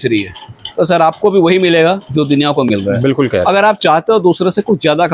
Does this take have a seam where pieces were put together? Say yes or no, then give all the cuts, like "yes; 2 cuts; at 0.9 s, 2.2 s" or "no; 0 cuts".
no; 0 cuts